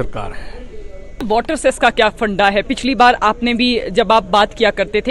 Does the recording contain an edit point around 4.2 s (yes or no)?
no